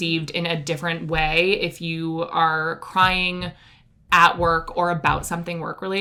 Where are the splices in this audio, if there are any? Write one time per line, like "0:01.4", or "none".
none